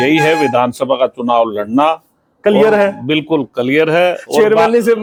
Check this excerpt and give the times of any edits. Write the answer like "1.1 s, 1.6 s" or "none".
none